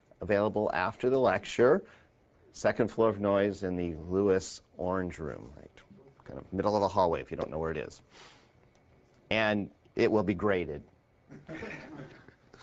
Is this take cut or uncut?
uncut